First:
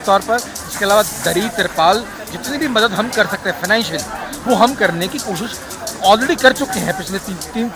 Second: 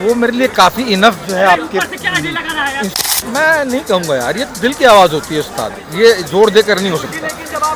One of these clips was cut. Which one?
second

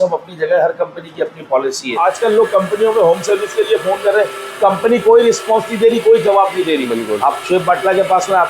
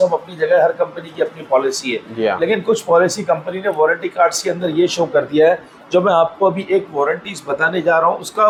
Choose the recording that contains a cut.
first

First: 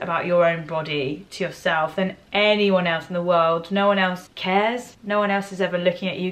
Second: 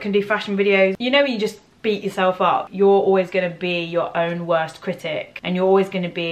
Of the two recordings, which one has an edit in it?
second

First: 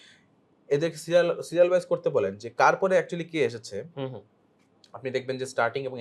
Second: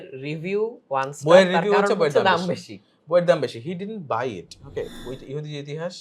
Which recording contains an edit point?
second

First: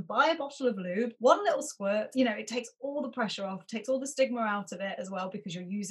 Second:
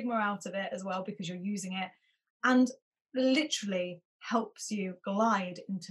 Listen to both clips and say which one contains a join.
first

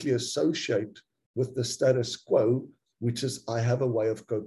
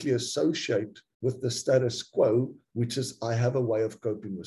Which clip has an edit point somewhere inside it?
second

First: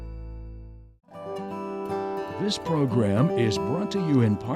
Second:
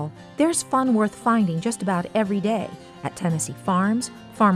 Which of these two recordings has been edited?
first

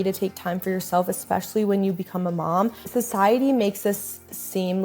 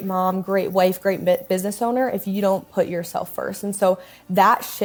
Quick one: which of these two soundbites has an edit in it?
first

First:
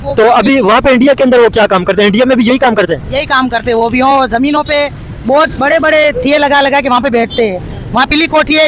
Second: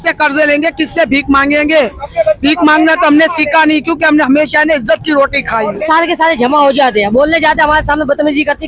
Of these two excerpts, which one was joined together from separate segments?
second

